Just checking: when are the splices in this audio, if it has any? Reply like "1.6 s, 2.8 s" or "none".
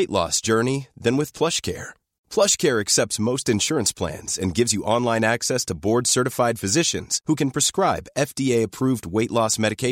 none